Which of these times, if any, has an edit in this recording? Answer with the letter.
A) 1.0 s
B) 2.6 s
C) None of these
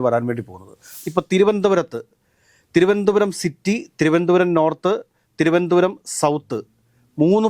A